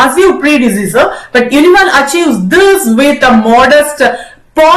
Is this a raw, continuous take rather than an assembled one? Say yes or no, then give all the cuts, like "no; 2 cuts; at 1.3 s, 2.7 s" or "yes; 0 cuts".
yes; 0 cuts